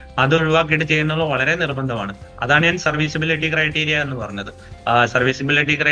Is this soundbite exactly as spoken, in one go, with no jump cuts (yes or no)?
yes